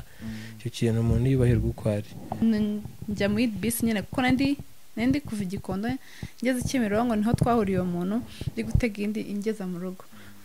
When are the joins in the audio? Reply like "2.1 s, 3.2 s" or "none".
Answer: 2.4 s